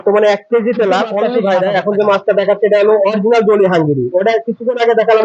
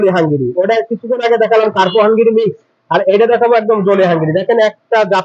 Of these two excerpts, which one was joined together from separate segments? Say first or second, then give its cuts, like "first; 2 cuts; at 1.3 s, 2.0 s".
first; 1 cut; at 1.2 s